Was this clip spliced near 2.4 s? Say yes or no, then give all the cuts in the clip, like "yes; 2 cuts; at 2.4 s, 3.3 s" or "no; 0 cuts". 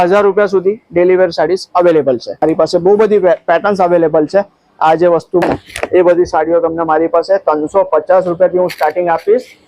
yes; 2 cuts; at 2.4 s, 5.4 s